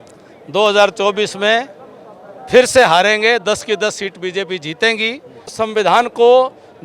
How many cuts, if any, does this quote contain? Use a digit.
1